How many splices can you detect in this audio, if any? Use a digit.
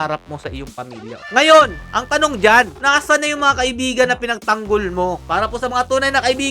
2